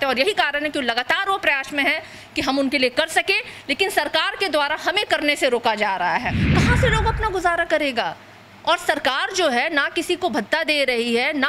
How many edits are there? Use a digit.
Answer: 1